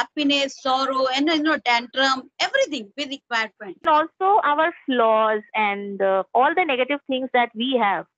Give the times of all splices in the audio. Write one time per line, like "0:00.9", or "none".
0:03.8